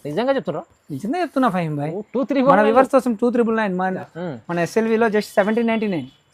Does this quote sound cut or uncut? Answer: cut